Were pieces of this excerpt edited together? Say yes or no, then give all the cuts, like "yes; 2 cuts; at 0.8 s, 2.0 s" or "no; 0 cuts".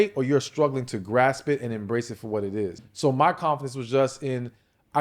yes; 1 cut; at 2.8 s